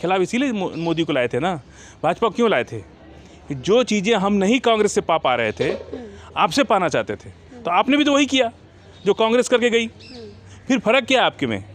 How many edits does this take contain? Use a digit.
0